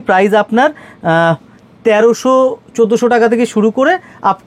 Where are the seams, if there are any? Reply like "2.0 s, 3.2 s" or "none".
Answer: none

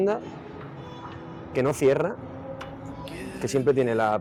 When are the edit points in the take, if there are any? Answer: none

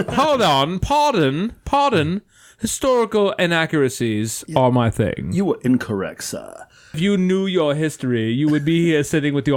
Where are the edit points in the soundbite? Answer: 7.0 s

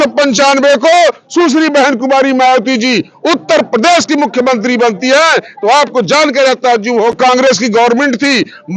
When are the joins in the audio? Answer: 7.1 s

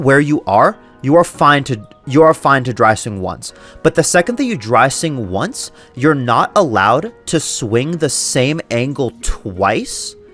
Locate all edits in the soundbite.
none

